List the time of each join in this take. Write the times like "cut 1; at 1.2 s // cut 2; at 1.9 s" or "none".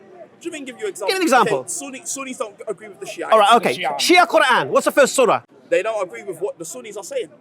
cut 1; at 5.5 s